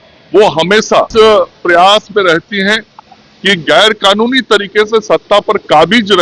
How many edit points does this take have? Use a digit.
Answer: 1